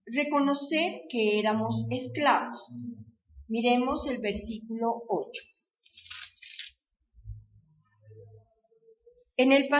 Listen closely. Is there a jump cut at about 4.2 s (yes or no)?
no